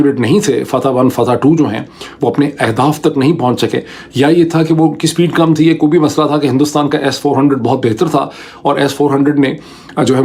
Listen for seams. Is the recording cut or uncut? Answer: uncut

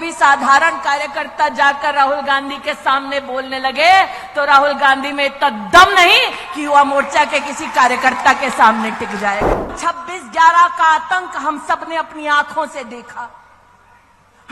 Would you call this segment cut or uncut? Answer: cut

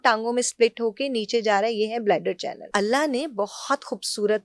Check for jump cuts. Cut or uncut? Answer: cut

